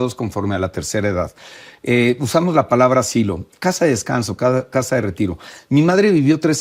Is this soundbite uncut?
yes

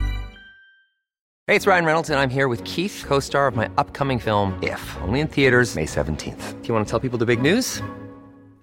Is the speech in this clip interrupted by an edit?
yes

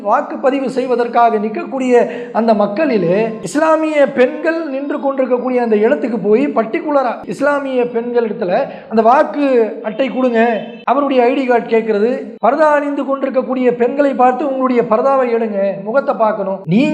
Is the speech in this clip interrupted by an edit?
yes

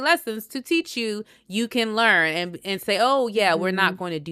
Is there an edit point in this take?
no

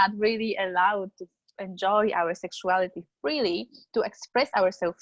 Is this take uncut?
yes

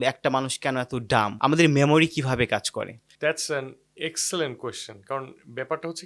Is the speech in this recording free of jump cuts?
yes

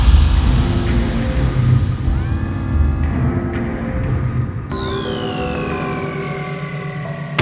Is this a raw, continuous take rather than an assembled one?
no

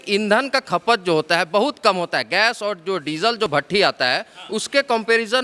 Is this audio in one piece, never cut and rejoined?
yes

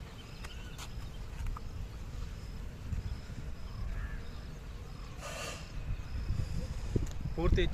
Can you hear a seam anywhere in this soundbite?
no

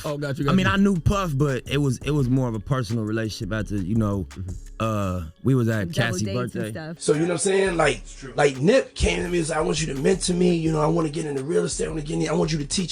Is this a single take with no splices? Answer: no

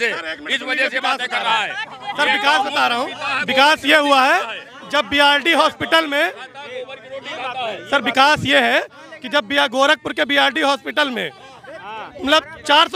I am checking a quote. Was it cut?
no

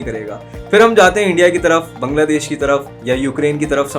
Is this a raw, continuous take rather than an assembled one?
no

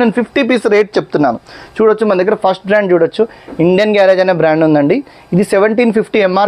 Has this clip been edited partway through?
no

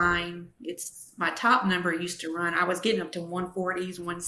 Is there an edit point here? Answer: no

